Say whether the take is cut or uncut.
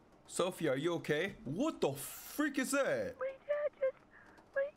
uncut